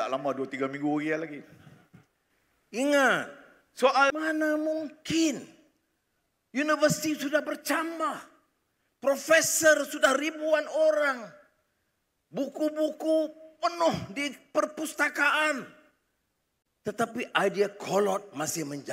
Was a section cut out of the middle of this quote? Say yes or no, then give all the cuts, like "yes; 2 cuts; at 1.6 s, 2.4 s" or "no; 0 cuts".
yes; 1 cut; at 2.5 s